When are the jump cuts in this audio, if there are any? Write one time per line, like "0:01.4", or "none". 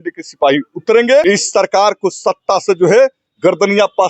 0:01.2